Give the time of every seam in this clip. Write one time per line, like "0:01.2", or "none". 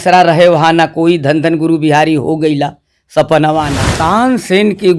0:03.8